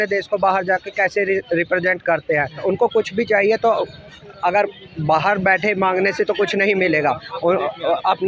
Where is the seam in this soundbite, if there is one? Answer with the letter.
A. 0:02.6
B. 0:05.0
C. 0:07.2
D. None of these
A